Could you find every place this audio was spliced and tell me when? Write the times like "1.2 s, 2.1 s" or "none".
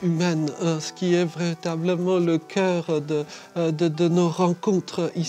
none